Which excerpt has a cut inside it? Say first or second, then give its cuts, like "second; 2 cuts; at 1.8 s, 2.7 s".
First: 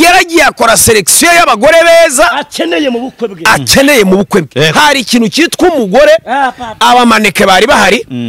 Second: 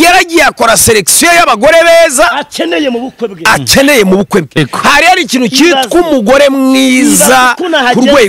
second; 1 cut; at 4.6 s